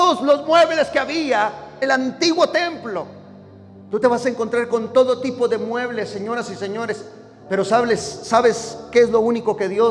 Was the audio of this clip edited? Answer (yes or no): yes